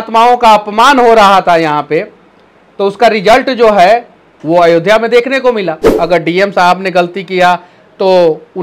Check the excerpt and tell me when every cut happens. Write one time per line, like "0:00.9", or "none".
0:05.8